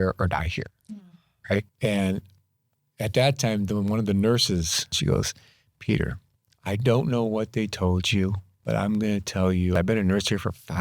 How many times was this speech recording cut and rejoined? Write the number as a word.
three